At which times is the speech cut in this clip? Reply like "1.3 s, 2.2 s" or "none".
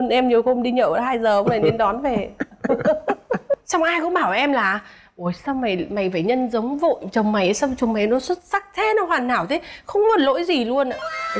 none

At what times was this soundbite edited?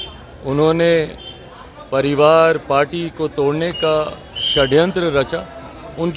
none

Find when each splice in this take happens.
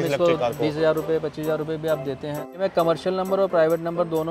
2.6 s

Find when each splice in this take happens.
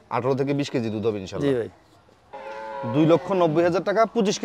2.1 s

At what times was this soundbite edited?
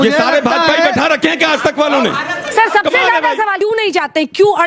3.5 s

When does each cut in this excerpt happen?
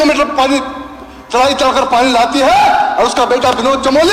none

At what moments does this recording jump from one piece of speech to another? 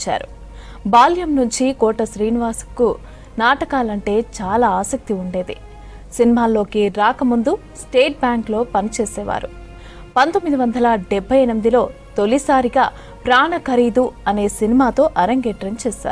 none

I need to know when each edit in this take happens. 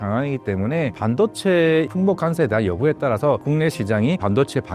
1.0 s, 1.9 s, 3.4 s

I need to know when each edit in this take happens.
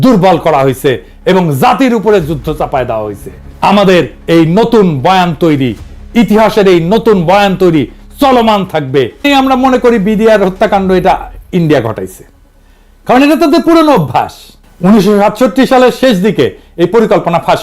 9.2 s

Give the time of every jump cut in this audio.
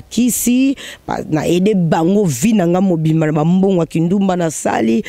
none

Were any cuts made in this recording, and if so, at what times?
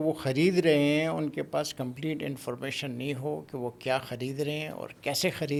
none

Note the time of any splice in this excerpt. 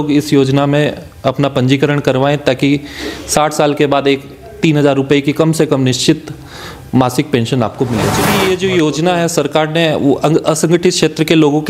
8.4 s

